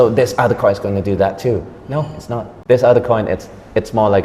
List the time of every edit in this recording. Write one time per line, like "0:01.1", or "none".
0:02.5